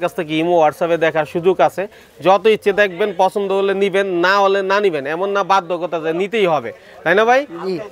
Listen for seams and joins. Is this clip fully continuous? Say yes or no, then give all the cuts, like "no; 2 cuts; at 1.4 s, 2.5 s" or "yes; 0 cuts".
yes; 0 cuts